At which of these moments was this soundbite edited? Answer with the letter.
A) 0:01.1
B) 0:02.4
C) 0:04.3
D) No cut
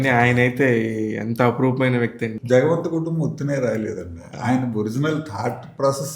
B